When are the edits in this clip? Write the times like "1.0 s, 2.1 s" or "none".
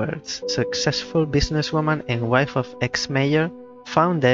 none